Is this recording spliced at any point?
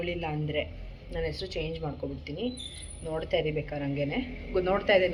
no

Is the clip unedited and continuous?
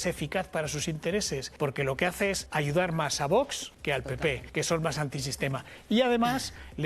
no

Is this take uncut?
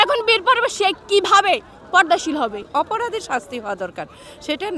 no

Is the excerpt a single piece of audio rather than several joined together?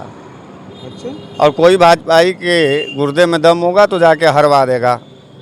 yes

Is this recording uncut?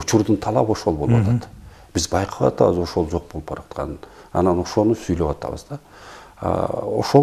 yes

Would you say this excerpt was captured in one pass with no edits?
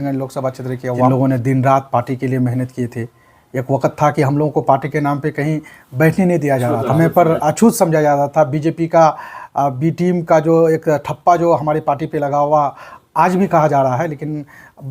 no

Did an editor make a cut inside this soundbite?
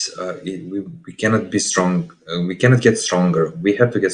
no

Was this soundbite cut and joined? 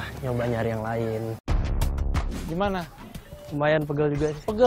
yes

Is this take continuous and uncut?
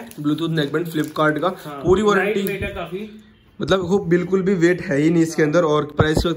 yes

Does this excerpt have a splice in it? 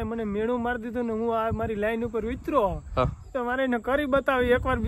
no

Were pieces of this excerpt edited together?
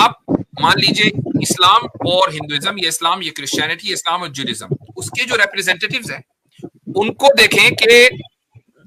no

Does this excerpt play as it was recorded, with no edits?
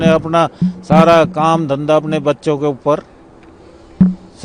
yes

